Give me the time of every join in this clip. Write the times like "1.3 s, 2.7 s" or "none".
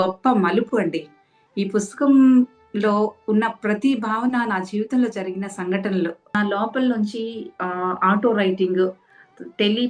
6.3 s